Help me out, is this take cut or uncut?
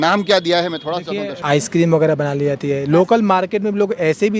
cut